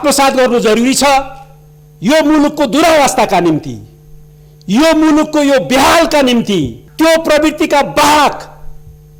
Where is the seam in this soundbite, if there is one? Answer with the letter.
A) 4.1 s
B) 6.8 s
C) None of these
B